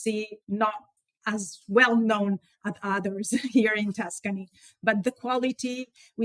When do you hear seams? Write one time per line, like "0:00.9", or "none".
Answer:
none